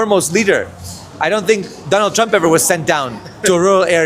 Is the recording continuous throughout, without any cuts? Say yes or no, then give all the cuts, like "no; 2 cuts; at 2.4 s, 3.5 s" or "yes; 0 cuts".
no; 1 cut; at 1.1 s